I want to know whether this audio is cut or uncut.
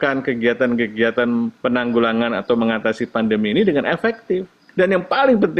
cut